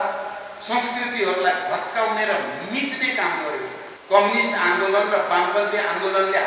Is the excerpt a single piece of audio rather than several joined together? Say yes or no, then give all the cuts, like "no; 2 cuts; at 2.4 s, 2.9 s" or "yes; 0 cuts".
no; 1 cut; at 3.9 s